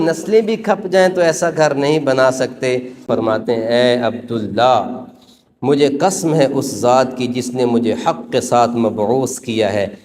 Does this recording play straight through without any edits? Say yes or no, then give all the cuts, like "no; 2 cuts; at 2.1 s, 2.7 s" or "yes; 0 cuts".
no; 1 cut; at 3.0 s